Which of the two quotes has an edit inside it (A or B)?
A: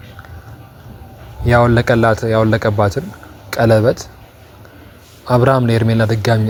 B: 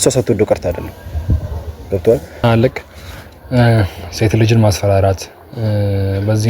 B